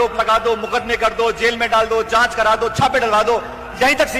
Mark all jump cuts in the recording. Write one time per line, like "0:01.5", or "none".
none